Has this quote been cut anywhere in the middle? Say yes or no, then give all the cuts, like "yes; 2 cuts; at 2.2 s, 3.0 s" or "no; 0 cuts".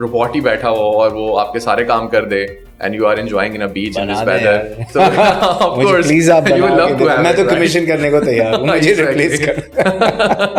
no; 0 cuts